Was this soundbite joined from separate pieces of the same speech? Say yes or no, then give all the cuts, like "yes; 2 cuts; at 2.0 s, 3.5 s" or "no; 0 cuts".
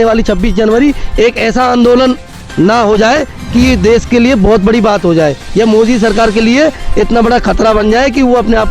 no; 0 cuts